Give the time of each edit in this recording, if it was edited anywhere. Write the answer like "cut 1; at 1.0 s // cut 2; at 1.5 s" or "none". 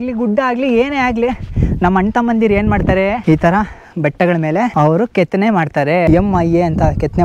cut 1; at 3.2 s // cut 2; at 4.7 s // cut 3; at 6.1 s